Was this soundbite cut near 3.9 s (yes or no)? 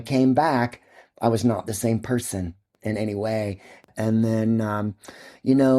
yes